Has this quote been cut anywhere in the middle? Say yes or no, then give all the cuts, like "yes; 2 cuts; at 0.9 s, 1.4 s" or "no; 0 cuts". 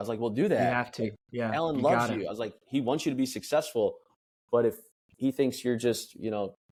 no; 0 cuts